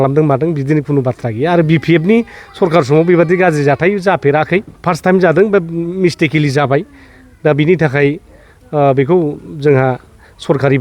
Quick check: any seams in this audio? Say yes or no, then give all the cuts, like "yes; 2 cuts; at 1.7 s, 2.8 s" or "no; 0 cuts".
yes; 1 cut; at 4.7 s